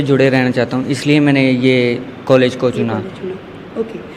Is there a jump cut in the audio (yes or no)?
no